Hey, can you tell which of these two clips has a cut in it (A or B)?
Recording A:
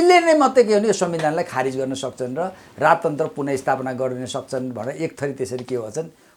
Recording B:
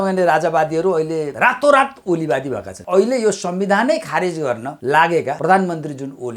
B